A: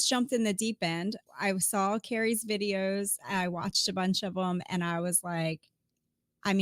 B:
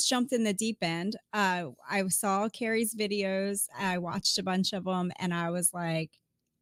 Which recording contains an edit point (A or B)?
A